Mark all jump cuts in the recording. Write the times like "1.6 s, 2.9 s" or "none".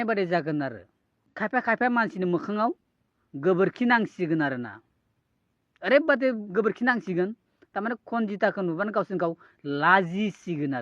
1.3 s